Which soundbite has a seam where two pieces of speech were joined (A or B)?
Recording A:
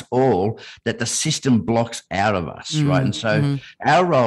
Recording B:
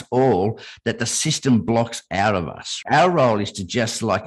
B